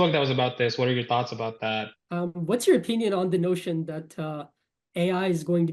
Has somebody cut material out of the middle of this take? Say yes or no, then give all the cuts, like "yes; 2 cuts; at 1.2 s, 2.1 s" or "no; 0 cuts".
yes; 1 cut; at 1.9 s